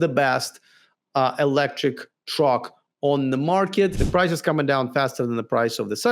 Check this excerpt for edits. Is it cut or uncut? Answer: cut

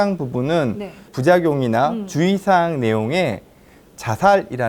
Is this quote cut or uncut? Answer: cut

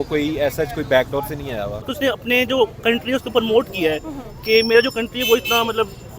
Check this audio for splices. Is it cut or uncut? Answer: cut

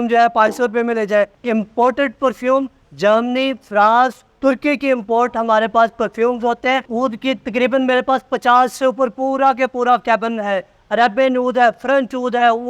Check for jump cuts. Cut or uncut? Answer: cut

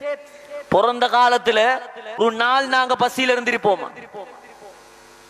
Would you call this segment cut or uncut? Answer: cut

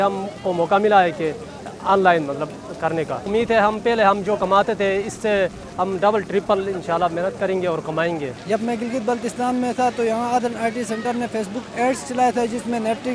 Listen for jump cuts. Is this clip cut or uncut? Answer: uncut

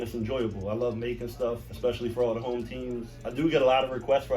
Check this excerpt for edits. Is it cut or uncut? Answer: cut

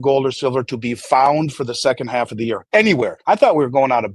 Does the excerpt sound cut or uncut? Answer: cut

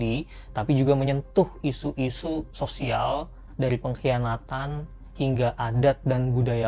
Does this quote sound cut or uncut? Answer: uncut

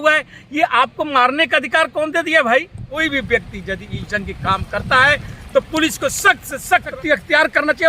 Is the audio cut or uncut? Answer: cut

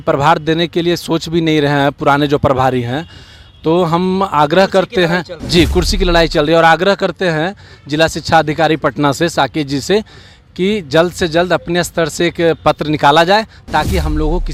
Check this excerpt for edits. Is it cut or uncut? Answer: uncut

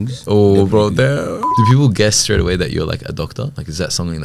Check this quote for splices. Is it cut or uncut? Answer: cut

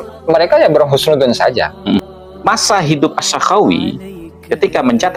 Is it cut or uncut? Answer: cut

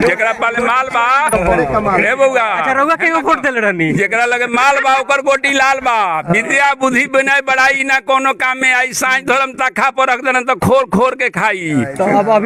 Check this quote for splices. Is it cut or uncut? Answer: cut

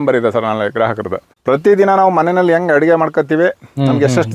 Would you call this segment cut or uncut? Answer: cut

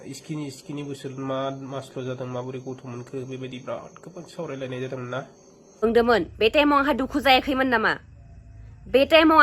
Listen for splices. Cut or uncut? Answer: cut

